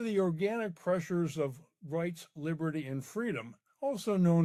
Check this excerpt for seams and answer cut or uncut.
uncut